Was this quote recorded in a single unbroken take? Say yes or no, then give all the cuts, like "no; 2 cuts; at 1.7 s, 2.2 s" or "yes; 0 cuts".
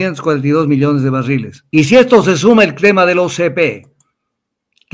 no; 1 cut; at 1.6 s